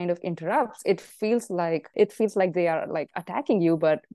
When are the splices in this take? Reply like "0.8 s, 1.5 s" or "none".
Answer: 1.9 s